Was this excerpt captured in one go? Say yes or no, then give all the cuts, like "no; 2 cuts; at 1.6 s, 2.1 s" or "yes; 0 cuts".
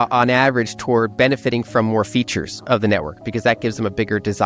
yes; 0 cuts